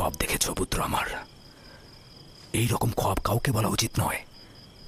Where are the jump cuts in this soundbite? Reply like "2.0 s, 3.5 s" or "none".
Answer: none